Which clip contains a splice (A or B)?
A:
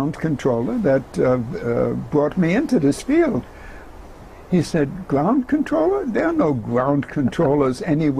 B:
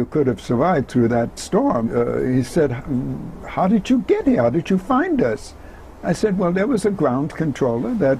B